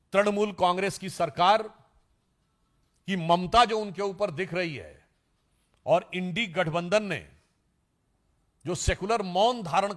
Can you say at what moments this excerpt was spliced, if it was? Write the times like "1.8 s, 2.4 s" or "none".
none